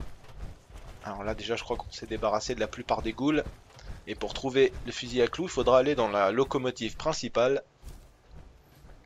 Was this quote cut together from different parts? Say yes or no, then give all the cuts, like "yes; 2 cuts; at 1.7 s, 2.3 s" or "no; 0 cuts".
yes; 1 cut; at 7.8 s